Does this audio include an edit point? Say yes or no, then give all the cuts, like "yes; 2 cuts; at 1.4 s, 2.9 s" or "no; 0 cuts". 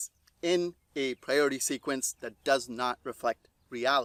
no; 0 cuts